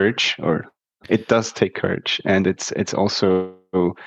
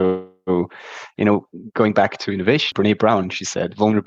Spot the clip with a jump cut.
second; 1 cut; at 2.7 s

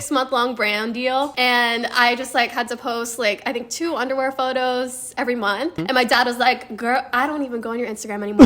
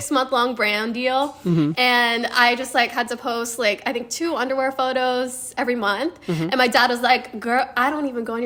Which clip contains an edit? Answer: first; 2 cuts; at 1.4 s, 5.8 s

